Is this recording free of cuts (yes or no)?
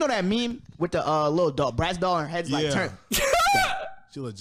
yes